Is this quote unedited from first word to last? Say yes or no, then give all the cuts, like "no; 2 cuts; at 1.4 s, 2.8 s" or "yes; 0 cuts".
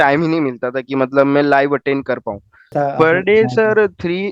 no; 1 cut; at 2.7 s